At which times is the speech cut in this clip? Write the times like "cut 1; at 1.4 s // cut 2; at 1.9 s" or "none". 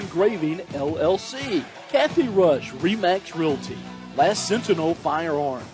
cut 1; at 1.8 s